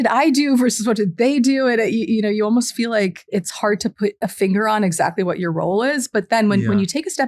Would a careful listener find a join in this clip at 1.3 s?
no; 2 cuts; at 3.2 s, 4.2 s

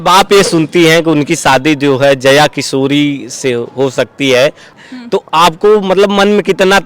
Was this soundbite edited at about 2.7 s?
no; 1 cut; at 4.7 s

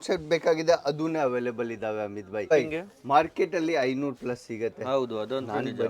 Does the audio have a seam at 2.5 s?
yes; 1 cut; at 2.5 s

